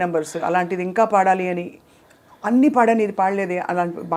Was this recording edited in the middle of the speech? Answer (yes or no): no